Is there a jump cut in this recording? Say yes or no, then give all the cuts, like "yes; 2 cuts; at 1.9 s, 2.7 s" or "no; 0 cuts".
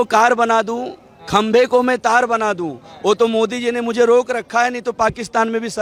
no; 0 cuts